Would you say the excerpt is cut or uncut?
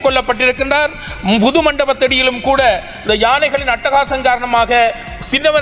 uncut